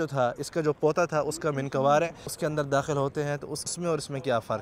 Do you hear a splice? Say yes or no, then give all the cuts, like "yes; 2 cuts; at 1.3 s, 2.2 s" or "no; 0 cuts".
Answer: yes; 2 cuts; at 2.3 s, 3.7 s